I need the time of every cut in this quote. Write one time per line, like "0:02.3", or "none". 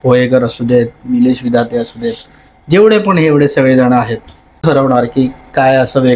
0:04.6